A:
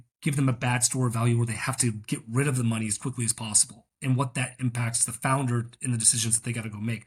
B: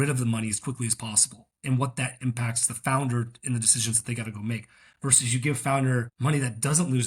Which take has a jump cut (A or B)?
B